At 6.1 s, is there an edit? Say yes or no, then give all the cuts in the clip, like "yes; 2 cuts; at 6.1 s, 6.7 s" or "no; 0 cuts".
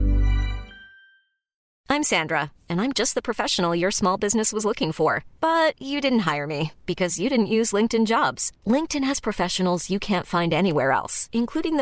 no; 1 cut; at 1.6 s